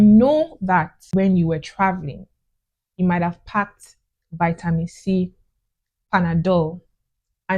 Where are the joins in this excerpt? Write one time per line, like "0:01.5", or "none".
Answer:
0:01.0